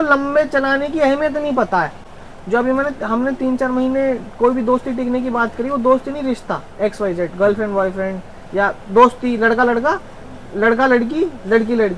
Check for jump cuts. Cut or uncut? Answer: uncut